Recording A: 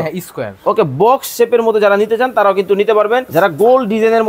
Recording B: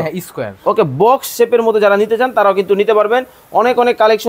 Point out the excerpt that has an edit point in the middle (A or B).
A